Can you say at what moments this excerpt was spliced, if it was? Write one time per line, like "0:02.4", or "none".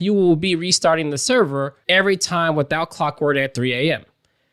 0:01.8